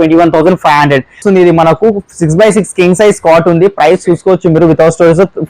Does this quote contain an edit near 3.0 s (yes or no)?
no